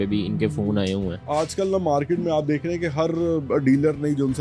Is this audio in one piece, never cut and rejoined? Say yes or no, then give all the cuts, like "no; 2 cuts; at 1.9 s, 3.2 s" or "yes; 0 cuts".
no; 1 cut; at 1.3 s